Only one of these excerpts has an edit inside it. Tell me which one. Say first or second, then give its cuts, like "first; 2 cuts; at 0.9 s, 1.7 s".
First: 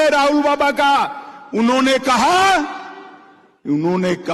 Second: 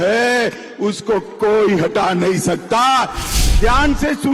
second; 1 cut; at 3.2 s